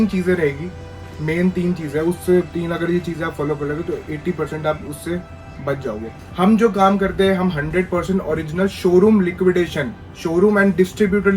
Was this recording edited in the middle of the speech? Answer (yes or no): yes